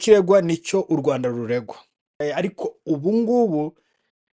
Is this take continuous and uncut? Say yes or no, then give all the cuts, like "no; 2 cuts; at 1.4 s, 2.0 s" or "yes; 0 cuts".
no; 1 cut; at 2.2 s